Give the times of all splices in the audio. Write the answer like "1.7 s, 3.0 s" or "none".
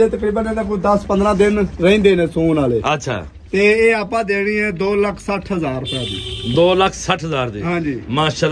none